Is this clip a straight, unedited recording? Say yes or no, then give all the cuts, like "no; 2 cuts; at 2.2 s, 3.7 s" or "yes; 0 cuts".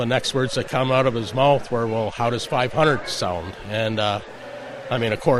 yes; 0 cuts